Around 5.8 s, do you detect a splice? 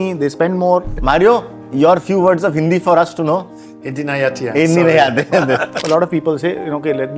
yes; 2 cuts; at 0.9 s, 5.8 s

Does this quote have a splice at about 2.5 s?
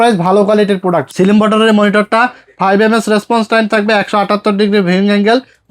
no; 1 cut; at 1.1 s

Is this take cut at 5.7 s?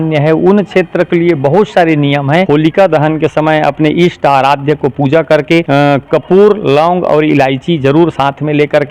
yes; 2 cuts; at 2.5 s, 5.7 s

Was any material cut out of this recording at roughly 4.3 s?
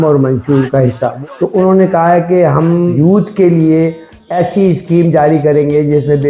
yes; 3 cuts; at 1.1 s, 2.9 s, 4.3 s

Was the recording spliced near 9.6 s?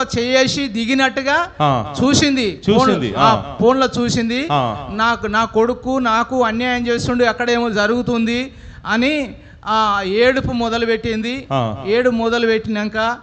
no; 0 cuts

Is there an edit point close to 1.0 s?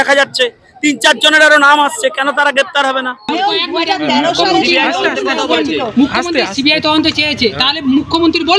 no; 1 cut; at 3.3 s

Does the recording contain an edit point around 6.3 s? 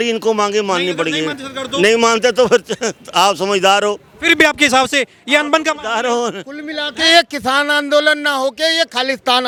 no; 0 cuts

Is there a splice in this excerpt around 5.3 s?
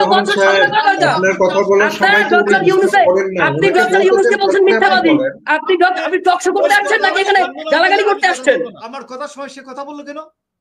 no; 1 cut; at 9.0 s

